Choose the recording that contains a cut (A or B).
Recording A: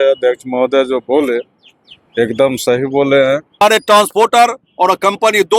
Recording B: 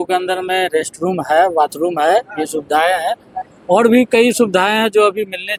A